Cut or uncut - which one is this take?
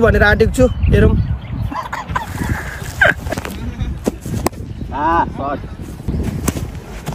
cut